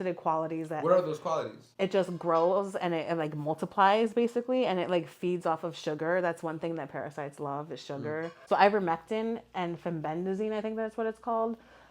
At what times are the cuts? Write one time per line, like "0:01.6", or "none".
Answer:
0:08.4

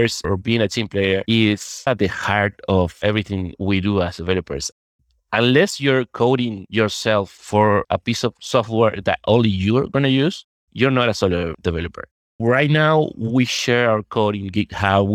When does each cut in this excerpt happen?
0:01.9
0:04.9

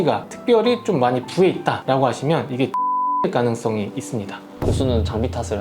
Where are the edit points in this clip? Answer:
0:04.4

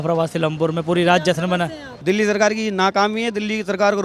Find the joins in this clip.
0:01.8

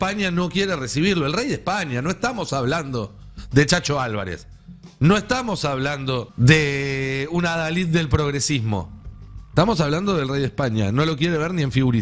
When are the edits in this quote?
0:06.3

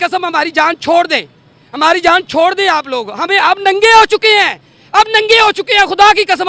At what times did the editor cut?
none

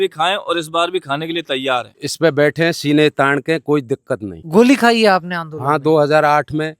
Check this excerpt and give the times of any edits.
0:02.0
0:04.5

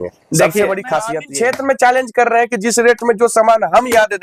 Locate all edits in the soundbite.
0:01.2

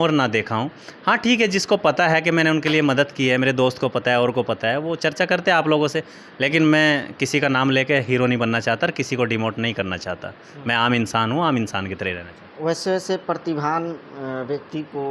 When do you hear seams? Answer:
none

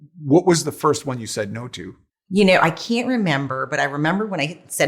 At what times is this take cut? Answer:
none

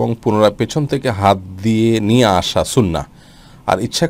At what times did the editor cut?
none

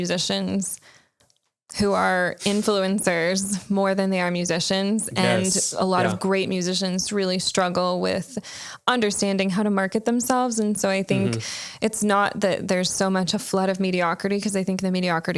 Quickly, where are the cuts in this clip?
none

